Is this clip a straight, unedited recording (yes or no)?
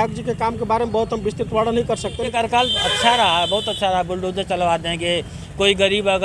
no